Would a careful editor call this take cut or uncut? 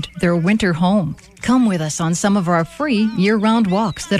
uncut